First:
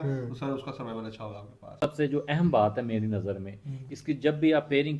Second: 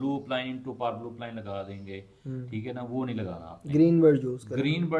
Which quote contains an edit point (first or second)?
first